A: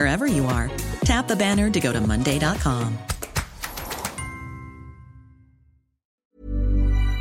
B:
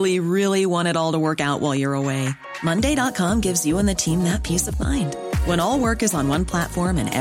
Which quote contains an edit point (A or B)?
A